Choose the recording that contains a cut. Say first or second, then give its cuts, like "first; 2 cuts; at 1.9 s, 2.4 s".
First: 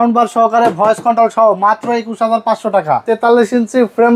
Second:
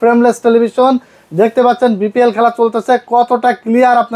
first; 1 cut; at 3.0 s